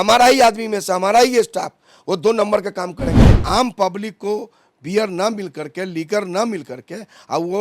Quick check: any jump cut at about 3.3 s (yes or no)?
yes